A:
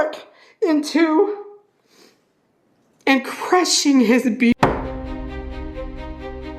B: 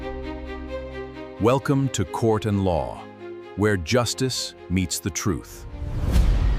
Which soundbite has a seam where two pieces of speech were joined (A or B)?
A